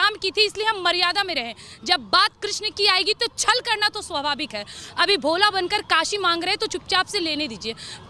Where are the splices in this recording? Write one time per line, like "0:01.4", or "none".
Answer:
none